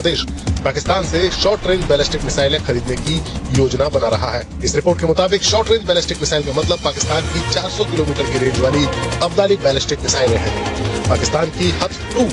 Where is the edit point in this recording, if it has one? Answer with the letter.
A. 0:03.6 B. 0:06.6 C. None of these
C